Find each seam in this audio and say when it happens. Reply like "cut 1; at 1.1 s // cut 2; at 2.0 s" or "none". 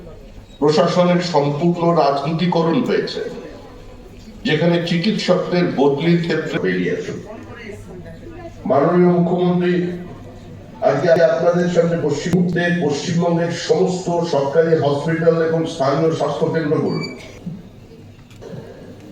cut 1; at 11.2 s